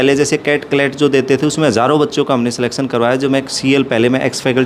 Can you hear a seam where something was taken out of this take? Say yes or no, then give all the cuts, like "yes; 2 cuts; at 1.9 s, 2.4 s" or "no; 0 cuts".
no; 0 cuts